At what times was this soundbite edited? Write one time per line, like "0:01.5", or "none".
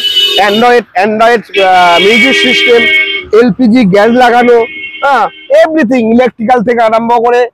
none